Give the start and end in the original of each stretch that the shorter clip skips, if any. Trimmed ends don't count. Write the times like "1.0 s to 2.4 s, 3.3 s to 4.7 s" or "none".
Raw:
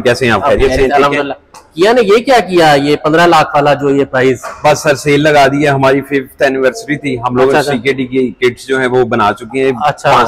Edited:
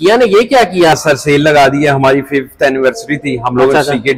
2.7 s to 4.7 s